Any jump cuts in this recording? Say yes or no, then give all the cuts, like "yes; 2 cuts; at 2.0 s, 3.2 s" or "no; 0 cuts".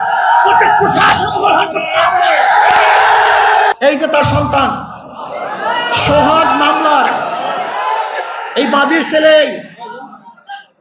yes; 1 cut; at 3.7 s